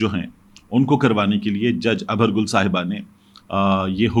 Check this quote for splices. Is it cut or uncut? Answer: uncut